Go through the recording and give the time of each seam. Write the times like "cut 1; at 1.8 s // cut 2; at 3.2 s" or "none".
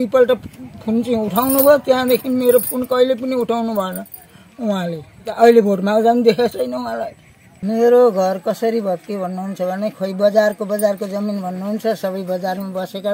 cut 1; at 5.2 s // cut 2; at 7.6 s